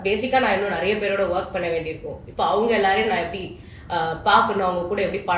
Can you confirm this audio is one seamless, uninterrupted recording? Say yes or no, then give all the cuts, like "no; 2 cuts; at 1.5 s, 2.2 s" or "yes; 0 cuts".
yes; 0 cuts